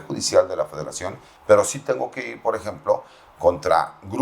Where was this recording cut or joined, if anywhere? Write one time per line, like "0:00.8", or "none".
0:01.3